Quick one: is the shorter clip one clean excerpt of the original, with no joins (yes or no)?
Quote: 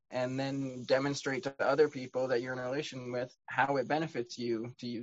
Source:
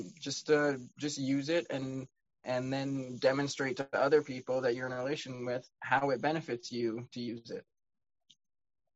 yes